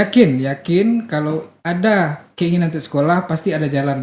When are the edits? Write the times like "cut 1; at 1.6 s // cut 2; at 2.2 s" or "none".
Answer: none